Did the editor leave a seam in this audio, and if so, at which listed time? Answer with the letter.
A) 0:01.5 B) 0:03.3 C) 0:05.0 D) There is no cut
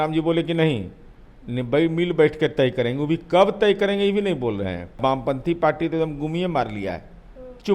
C